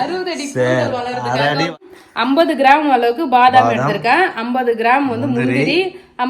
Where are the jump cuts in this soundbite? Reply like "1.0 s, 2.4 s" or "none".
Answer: 1.7 s